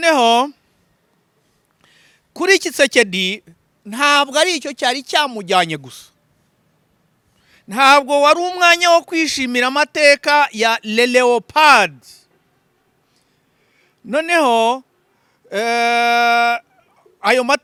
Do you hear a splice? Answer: no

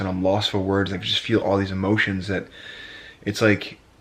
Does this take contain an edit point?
yes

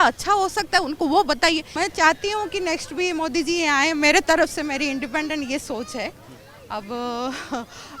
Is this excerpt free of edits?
no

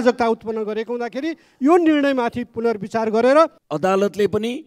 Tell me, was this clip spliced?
yes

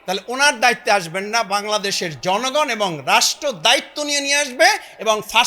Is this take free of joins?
yes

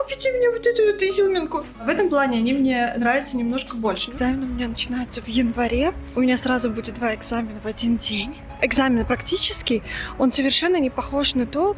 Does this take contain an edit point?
yes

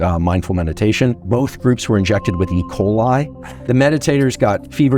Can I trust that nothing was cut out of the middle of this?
no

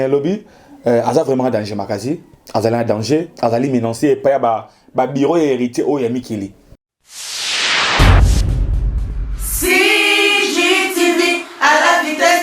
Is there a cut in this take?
yes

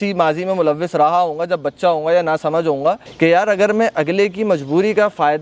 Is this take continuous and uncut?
no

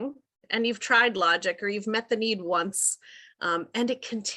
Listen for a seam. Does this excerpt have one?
no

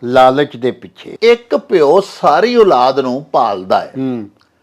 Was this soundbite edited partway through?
yes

